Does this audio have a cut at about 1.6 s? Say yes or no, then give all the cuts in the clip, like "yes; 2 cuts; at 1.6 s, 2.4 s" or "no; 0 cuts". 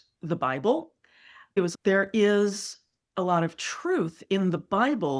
yes; 1 cut; at 1.6 s